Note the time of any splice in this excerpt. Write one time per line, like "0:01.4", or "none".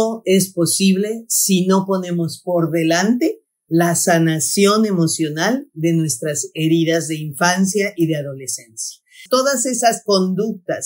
0:09.2